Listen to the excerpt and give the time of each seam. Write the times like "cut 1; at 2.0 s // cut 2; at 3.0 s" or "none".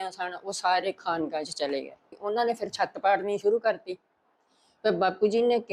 cut 1; at 2.2 s